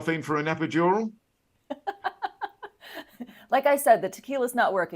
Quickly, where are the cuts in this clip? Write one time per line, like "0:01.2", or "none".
none